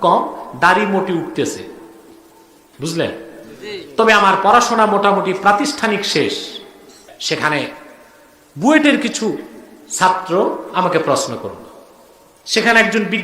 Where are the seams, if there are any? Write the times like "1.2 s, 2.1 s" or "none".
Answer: 7.2 s